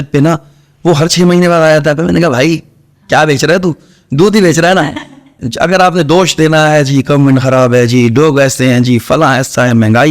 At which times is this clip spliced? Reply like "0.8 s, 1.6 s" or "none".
5.4 s

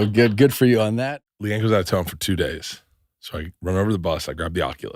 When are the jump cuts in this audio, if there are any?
1.2 s

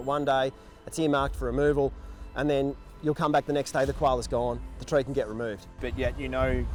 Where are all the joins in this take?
none

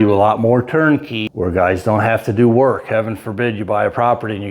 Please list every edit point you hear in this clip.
1.2 s

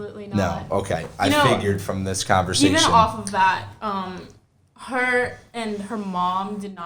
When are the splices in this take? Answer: none

